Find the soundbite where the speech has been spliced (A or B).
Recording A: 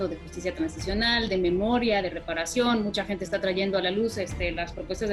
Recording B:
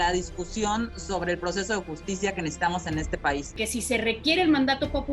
B